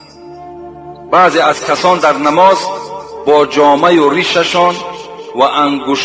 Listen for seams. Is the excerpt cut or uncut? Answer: uncut